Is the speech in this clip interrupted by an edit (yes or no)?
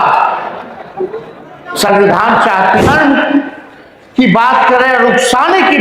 yes